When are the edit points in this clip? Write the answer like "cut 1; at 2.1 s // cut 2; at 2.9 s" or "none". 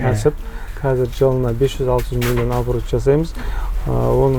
none